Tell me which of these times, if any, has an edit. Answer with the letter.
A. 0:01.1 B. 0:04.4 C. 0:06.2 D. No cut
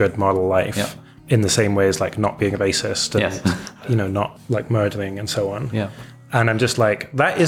B